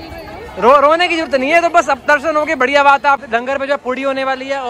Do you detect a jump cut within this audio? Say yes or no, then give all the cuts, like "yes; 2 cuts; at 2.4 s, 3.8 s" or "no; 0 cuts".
yes; 1 cut; at 3.2 s